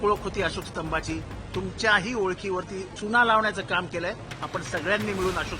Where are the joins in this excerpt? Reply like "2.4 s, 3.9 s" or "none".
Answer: 2.9 s